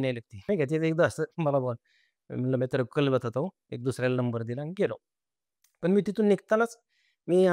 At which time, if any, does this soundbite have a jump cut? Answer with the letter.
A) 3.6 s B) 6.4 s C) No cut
C